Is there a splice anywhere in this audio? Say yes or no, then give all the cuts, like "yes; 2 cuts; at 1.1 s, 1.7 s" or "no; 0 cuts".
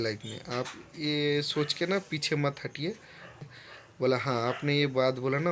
yes; 1 cut; at 3.4 s